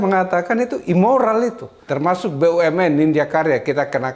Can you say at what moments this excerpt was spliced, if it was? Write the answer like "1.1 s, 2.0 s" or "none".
1.8 s